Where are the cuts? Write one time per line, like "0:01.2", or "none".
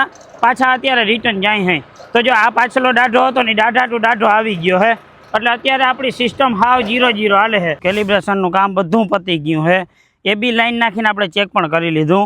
0:07.8